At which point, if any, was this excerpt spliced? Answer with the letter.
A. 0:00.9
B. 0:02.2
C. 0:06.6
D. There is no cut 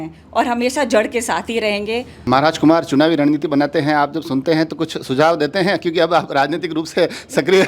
B